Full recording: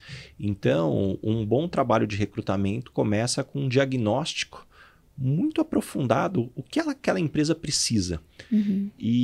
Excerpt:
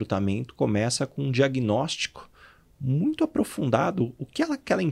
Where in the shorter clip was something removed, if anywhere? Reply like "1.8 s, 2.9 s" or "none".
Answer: none